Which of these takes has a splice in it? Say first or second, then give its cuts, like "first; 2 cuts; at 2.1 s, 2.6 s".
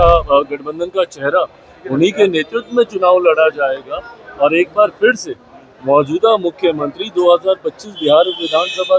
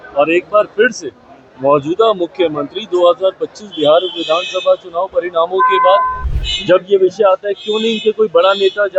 second; 1 cut; at 6.2 s